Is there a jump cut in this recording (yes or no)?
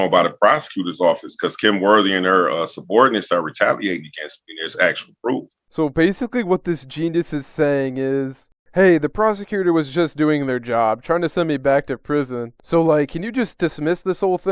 no